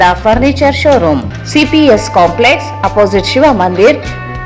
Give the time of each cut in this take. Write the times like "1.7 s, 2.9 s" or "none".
1.0 s